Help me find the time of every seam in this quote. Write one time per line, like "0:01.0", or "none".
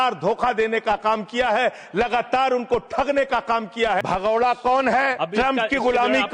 0:04.0
0:05.2